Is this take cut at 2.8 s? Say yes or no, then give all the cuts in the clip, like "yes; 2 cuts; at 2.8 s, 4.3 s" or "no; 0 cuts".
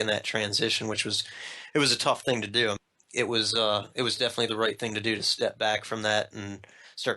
yes; 1 cut; at 2.8 s